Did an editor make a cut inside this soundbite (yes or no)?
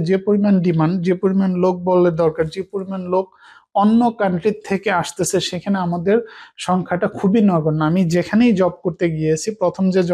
no